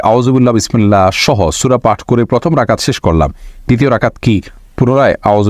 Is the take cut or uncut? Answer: uncut